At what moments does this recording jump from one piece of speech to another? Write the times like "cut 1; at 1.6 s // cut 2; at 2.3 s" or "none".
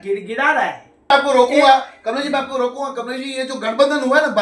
cut 1; at 1.1 s